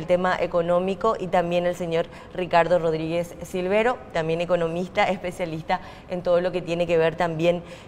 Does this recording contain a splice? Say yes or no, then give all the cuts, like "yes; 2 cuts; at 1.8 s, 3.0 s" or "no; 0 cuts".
yes; 1 cut; at 6.1 s